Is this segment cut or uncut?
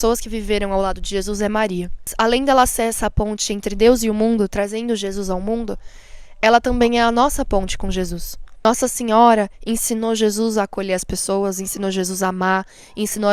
cut